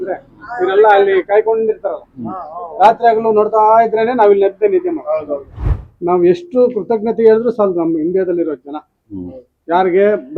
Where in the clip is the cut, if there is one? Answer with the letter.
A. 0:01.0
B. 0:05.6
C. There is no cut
B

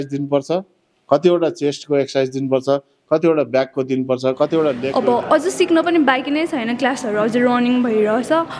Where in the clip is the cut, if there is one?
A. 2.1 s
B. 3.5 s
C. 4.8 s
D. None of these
C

